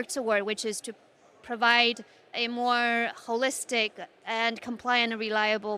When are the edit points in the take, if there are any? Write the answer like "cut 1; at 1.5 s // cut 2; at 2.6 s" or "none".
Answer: cut 1; at 2.4 s